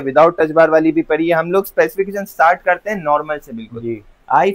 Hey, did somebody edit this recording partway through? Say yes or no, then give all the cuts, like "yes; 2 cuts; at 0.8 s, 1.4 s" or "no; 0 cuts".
no; 0 cuts